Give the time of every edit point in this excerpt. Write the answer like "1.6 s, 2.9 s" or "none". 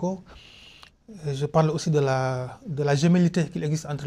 none